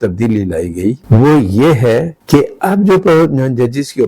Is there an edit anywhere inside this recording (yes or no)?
yes